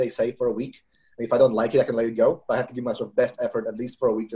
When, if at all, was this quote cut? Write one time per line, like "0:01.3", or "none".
none

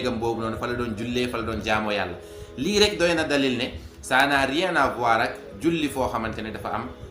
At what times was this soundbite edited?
none

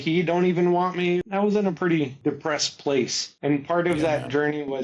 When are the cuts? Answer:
0:01.2
0:02.1
0:03.2

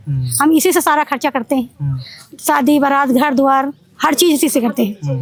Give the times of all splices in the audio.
none

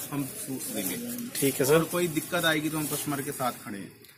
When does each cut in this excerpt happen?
none

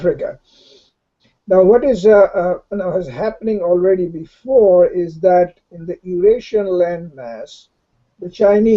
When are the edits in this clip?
0:01.3

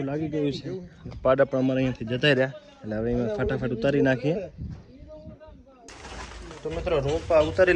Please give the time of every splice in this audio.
0:05.8

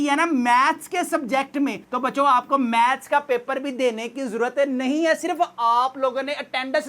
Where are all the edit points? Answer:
none

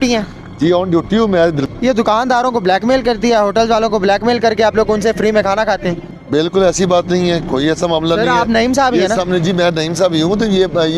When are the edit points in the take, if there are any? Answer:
0:01.6
0:06.1

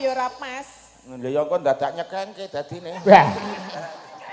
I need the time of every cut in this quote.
none

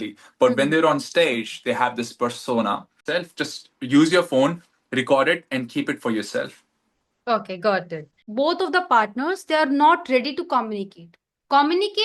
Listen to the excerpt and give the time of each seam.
0:03.0
0:08.2

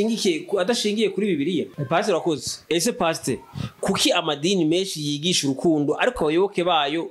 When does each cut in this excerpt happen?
0:01.7

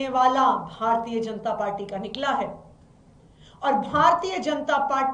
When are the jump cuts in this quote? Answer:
none

